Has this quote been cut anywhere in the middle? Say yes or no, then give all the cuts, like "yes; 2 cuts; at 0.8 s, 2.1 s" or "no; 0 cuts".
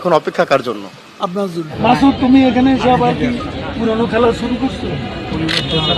yes; 1 cut; at 1.7 s